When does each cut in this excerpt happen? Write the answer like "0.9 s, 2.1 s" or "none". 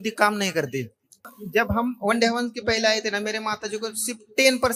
1.4 s